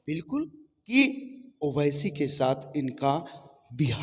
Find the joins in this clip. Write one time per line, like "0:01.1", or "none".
0:00.9